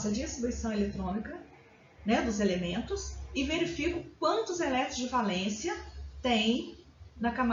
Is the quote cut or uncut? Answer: uncut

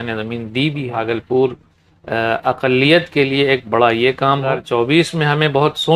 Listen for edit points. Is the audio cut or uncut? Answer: cut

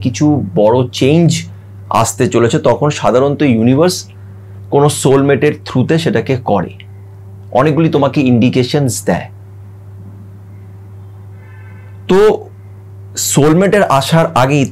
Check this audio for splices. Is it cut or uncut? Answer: uncut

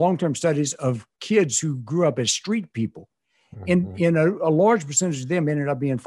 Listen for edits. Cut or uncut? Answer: uncut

